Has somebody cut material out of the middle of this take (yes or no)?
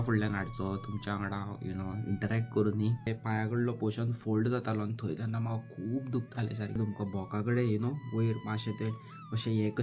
yes